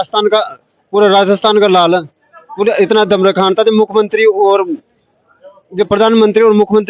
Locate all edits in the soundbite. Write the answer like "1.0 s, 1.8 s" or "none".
none